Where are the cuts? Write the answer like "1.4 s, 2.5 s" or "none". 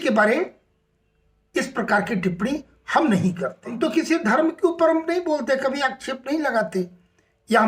3.8 s